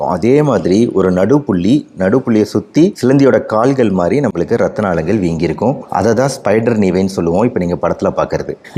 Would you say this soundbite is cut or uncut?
uncut